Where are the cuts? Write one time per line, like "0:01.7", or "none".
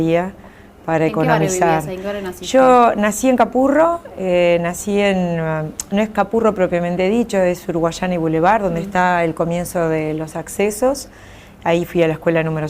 0:06.0